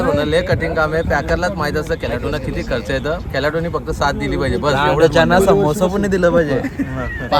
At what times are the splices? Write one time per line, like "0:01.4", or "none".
none